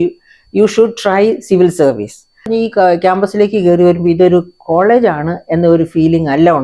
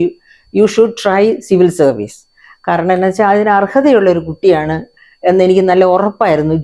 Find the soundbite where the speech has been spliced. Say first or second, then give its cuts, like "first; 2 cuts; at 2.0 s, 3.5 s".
first; 1 cut; at 2.5 s